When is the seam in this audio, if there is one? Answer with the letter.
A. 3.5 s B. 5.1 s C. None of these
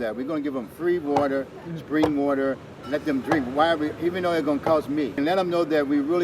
B